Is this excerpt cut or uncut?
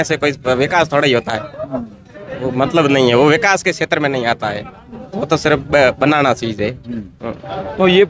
uncut